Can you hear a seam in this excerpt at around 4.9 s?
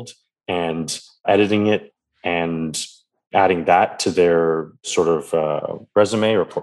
yes; 3 cuts; at 1.2 s, 3.3 s, 4.9 s

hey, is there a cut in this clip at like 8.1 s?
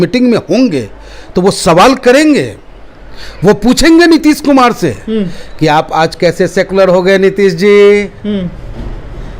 no; 0 cuts

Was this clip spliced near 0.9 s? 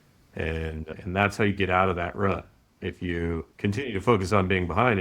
no; 1 cut; at 3.5 s

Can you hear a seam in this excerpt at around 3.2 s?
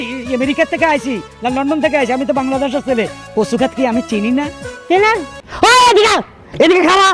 no; 1 cut; at 5.4 s

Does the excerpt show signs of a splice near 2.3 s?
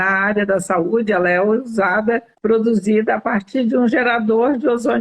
yes; 1 cut; at 2.3 s

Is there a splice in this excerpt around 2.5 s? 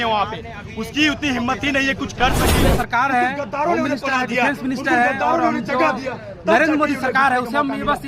yes; 1 cut; at 2.5 s

